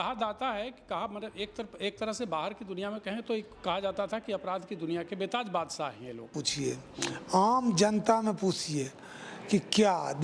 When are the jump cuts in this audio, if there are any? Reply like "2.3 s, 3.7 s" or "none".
6.2 s